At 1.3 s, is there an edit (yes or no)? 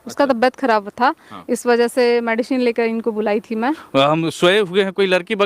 no